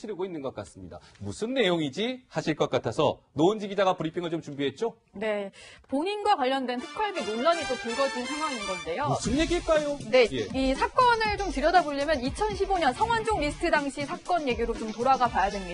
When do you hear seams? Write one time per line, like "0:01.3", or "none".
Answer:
none